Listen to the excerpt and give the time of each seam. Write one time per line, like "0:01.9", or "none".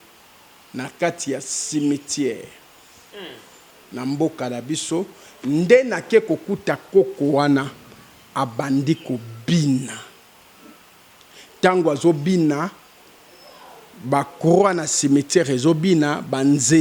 none